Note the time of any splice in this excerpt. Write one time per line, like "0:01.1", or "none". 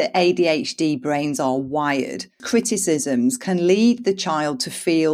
0:02.4